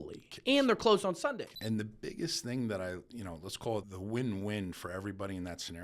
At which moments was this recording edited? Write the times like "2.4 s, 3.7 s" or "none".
1.5 s, 3.9 s